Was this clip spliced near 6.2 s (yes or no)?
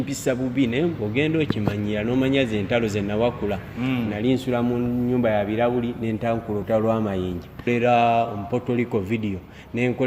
no